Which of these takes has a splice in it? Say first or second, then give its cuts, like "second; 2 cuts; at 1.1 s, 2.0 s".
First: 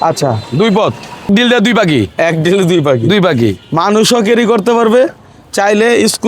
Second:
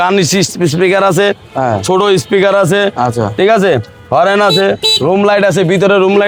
first; 1 cut; at 1.3 s